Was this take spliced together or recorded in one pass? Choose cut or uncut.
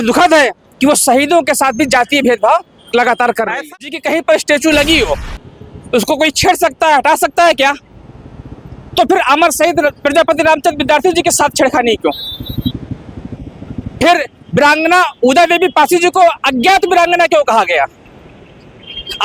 cut